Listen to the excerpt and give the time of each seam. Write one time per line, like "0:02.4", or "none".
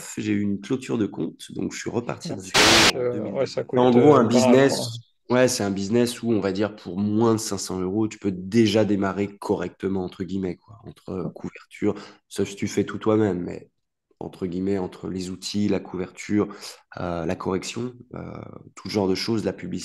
0:02.9